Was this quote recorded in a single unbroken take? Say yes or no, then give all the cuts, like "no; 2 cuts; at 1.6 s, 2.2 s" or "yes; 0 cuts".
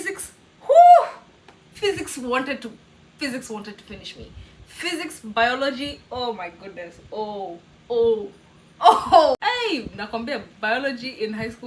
no; 1 cut; at 9.4 s